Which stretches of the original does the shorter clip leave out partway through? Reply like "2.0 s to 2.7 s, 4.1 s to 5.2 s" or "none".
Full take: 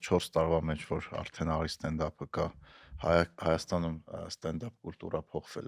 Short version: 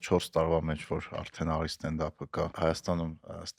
2.5 s to 3.4 s